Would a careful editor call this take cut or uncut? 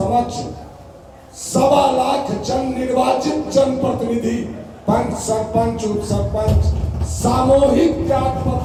uncut